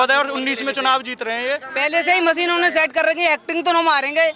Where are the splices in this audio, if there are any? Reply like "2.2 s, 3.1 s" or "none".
1.7 s